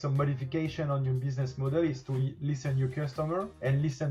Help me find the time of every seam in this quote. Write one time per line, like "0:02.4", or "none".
none